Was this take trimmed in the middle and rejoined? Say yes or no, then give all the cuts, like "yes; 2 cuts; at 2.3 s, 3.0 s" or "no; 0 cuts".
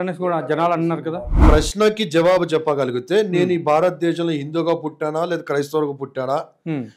yes; 1 cut; at 1.4 s